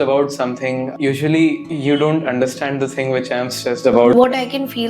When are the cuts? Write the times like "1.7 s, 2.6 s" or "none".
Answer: 0.9 s, 1.6 s, 4.1 s